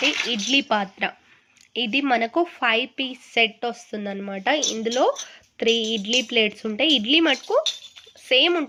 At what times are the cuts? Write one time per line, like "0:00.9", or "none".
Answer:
none